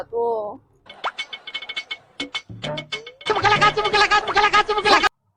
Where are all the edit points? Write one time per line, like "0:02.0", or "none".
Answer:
0:00.9